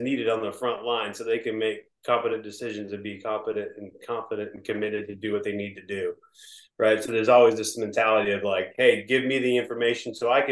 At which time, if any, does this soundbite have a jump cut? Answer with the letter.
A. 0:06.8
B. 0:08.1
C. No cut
C